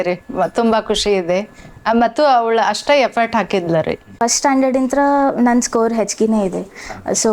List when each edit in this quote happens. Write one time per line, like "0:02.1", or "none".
0:04.1